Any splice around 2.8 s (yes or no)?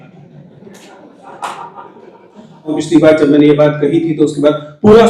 yes